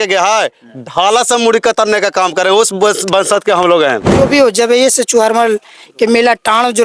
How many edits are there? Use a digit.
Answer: 1